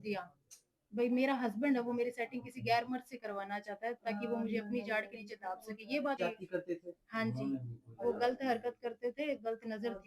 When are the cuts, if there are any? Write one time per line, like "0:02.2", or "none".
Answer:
0:06.2

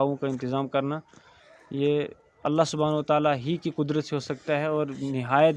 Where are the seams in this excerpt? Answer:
none

